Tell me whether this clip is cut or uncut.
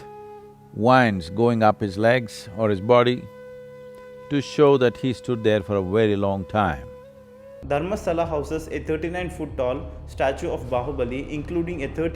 cut